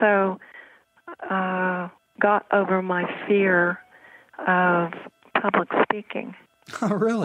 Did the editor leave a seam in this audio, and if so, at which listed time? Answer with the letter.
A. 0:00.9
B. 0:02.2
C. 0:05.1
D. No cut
C